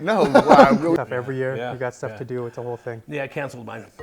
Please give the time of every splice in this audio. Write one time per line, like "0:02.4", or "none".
0:01.0